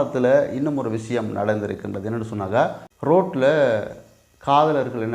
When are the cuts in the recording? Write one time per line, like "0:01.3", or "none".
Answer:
0:02.9